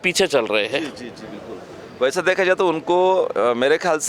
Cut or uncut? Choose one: uncut